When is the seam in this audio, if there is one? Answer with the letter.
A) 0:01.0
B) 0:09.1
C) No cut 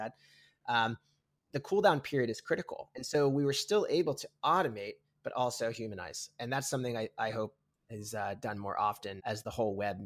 B